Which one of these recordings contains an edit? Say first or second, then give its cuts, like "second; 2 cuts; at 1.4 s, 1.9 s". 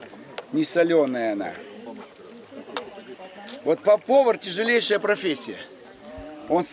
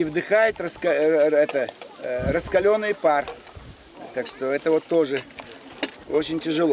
second; 1 cut; at 1.6 s